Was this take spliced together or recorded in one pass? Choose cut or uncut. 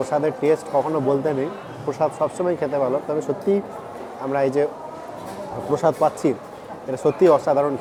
uncut